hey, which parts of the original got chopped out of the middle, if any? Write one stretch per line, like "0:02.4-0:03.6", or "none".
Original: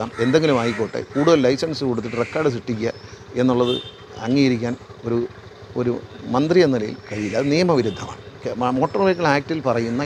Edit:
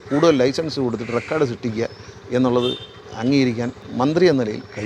0:04.9-0:06.2

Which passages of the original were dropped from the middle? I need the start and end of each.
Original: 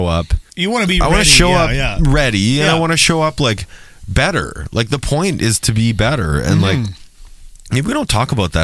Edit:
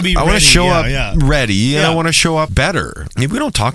0:03.3-0:07.0

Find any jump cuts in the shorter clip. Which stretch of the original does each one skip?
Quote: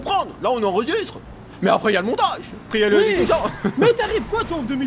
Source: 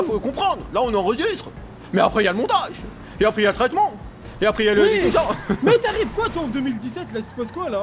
0:03.0-0:04.6

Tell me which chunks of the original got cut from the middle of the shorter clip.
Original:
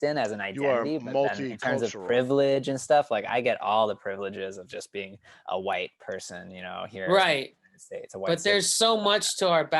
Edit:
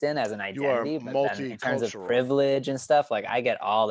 none

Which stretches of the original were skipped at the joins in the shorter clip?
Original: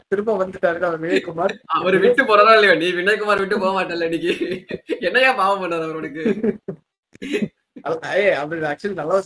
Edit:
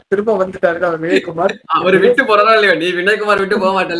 none

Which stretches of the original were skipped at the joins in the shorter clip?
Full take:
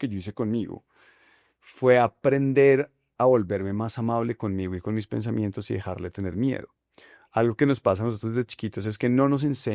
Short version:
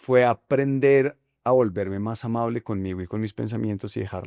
none

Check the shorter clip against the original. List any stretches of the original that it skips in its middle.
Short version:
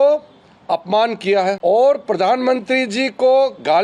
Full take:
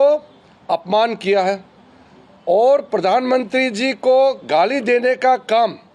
0:01.6-0:02.4

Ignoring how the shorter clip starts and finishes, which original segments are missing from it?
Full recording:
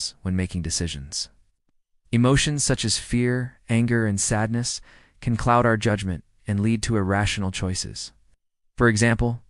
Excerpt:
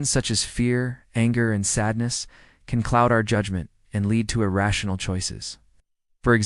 none

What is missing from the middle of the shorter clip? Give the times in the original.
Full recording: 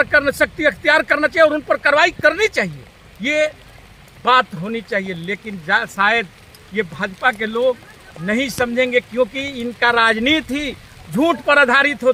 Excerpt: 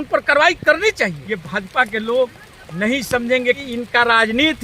0:02.8-0:06.7
0:09.1-0:09.5

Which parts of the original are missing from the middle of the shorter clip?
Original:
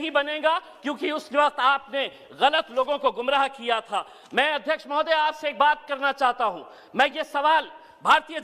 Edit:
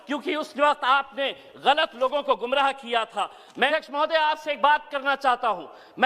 0:04.5-0:04.7

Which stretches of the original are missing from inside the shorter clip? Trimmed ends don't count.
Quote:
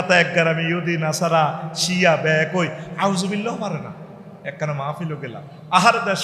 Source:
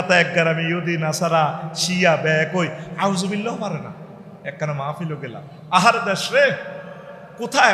none

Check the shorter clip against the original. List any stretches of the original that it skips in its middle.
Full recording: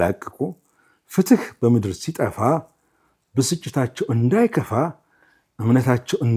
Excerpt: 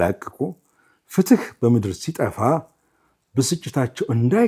none

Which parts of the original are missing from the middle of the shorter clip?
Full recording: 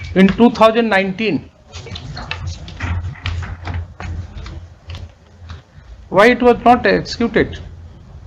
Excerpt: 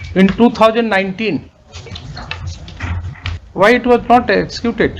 0:03.4-0:05.9

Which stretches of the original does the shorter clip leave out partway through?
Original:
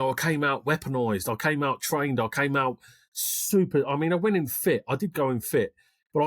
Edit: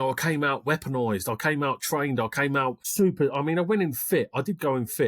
0:02.8-0:03.4

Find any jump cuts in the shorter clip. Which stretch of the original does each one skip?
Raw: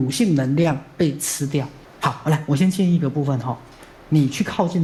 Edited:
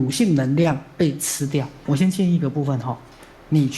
0:01.8-0:02.4

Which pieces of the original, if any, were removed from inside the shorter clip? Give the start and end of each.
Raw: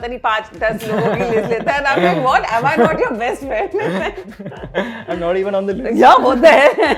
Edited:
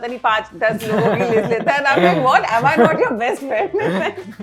none

